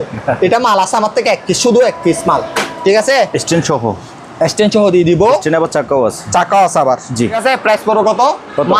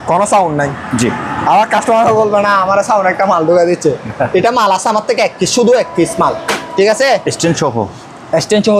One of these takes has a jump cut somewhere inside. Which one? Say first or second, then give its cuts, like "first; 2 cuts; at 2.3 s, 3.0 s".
first; 1 cut; at 7.4 s